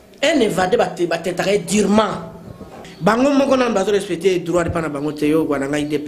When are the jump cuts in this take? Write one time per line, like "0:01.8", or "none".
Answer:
0:02.8